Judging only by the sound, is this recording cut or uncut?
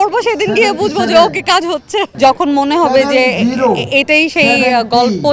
cut